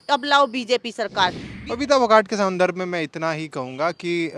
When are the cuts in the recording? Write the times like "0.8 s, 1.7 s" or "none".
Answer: 1.5 s